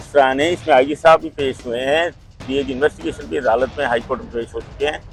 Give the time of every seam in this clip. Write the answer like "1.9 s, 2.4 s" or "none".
none